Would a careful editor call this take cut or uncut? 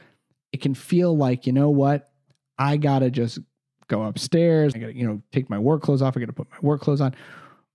cut